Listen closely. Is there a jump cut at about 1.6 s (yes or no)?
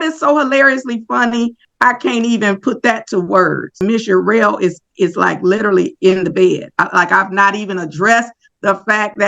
yes